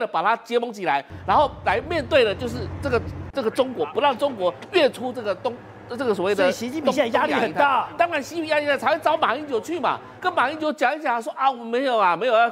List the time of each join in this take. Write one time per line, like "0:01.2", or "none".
none